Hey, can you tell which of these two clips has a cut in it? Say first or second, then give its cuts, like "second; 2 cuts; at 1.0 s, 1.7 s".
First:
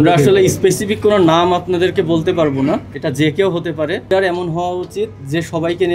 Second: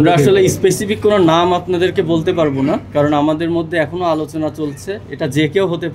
first; 2 cuts; at 2.9 s, 4.1 s